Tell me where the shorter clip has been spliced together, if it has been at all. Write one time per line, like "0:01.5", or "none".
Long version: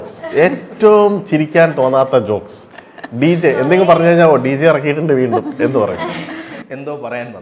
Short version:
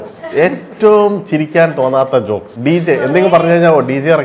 0:02.5